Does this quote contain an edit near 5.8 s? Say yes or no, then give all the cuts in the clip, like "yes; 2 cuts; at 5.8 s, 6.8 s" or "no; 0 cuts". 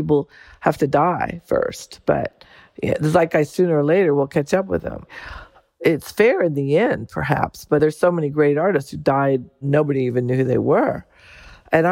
yes; 3 cuts; at 5.8 s, 7.8 s, 9.6 s